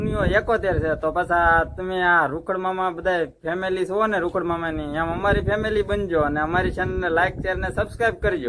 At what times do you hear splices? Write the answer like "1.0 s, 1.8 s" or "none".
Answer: none